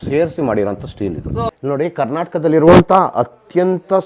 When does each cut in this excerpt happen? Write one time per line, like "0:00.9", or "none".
0:01.5